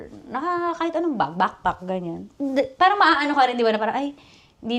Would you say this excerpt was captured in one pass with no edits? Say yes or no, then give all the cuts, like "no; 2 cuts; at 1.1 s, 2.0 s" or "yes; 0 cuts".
yes; 0 cuts